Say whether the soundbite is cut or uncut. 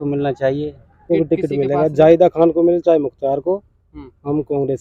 cut